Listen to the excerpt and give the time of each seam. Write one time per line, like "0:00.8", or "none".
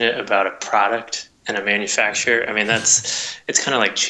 none